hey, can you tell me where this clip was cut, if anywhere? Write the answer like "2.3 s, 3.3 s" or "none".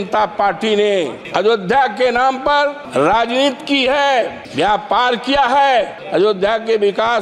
1.2 s, 2.8 s, 4.4 s, 6.0 s